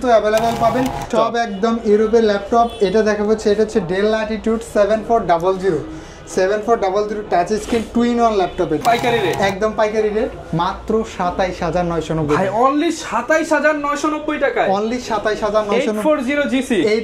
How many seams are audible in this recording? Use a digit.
2